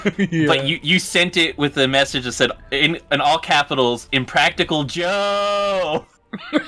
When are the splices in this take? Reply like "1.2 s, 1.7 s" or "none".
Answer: none

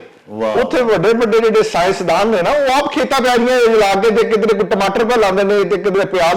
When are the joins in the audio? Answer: none

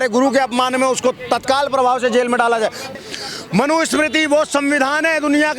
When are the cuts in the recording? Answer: 2.8 s

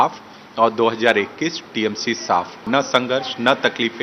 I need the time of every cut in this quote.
2.6 s

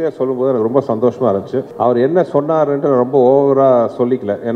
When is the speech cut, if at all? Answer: 1.7 s

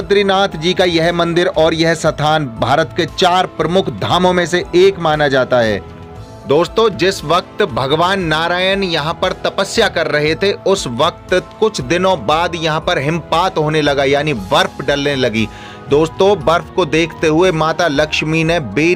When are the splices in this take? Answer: none

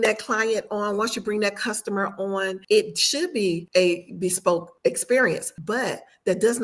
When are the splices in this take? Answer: 2.6 s, 3.6 s, 4.7 s, 5.5 s

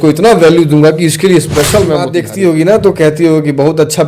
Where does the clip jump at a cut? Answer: 2.2 s

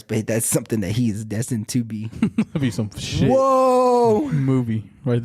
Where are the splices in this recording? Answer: none

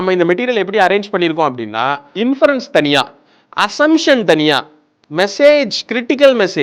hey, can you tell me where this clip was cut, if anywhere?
2.0 s

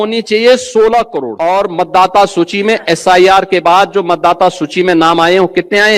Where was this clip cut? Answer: 1.2 s

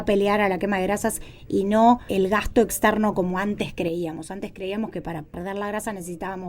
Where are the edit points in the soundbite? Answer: 2.1 s, 5.3 s

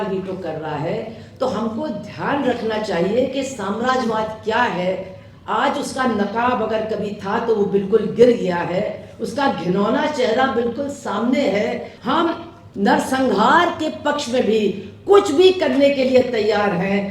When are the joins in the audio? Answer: 11.9 s

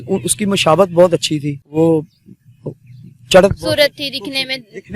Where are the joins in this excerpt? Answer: 1.6 s

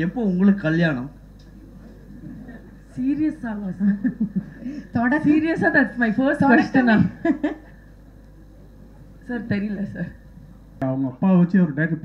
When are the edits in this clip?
10.8 s

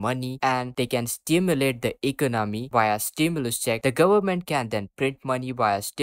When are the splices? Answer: none

